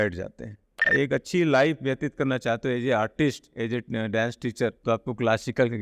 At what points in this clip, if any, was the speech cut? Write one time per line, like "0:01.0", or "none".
0:00.8
0:04.8